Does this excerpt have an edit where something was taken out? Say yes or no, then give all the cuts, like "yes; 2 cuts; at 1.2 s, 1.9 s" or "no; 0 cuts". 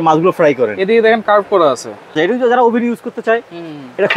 yes; 1 cut; at 2.2 s